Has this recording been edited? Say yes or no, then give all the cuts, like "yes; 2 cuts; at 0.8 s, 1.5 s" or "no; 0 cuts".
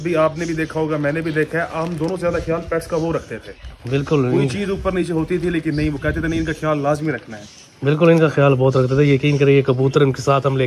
no; 0 cuts